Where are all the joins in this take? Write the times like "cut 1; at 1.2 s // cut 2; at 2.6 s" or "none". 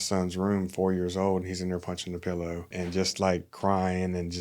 cut 1; at 2.7 s